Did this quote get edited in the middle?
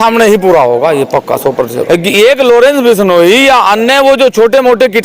yes; 1 cut; at 1.8 s

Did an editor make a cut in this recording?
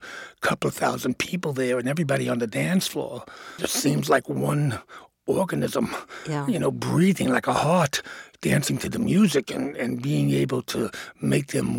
yes; 1 cut; at 3.5 s

